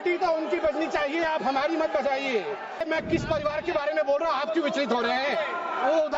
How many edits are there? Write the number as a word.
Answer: one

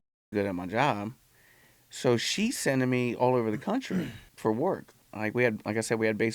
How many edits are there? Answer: two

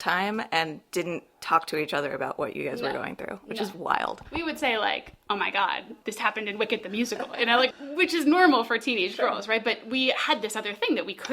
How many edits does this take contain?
two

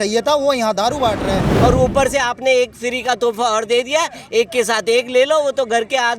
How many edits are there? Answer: one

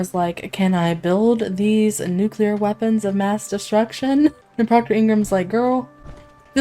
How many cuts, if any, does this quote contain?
one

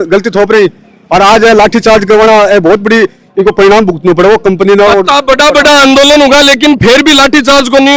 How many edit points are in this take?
zero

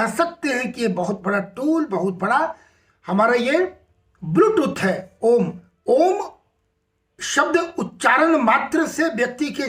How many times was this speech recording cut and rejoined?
one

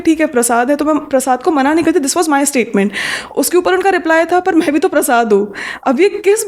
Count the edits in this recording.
zero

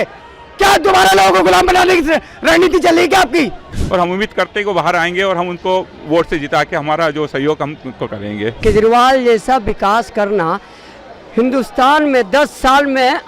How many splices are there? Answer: two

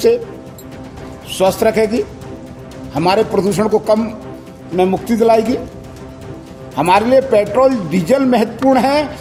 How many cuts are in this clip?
zero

